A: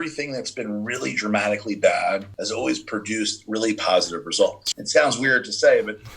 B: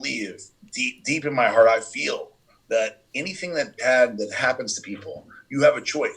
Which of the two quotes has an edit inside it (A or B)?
A